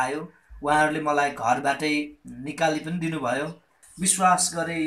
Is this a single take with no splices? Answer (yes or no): no